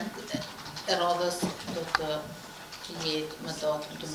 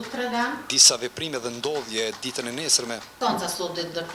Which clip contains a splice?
second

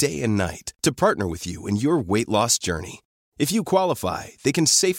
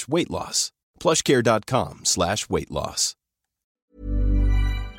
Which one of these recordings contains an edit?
second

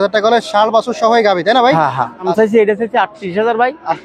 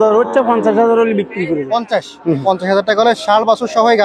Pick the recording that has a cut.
first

